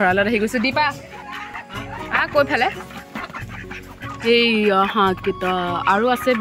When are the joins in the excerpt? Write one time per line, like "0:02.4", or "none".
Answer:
none